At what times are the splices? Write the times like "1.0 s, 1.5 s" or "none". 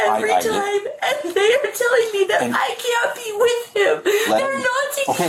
4.3 s